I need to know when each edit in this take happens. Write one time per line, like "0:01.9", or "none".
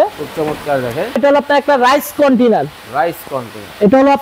0:01.2